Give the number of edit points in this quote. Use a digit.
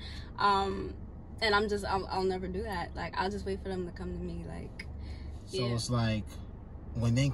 1